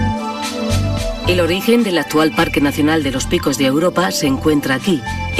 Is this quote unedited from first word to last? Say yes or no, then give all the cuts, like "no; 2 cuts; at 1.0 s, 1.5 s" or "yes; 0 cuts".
no; 1 cut; at 1.5 s